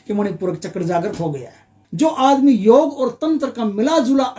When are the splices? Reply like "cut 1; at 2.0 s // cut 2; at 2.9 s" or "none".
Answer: cut 1; at 1.8 s